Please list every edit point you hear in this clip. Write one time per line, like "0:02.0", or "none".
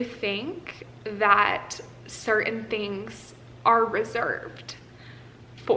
none